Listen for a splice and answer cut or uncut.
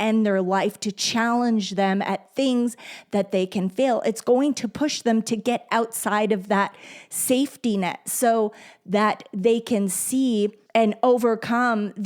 cut